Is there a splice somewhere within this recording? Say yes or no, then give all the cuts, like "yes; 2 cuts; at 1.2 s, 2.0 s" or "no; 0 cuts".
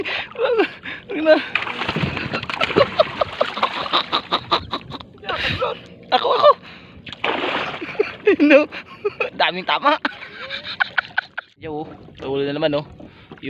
yes; 1 cut; at 11.6 s